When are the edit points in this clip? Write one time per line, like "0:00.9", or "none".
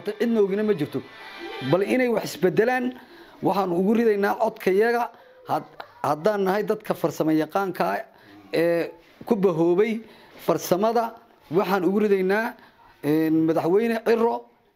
none